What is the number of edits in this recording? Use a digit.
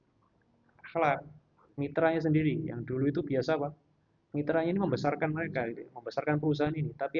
1